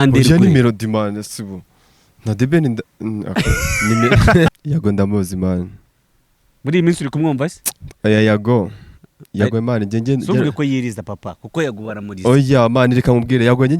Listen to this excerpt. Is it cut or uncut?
cut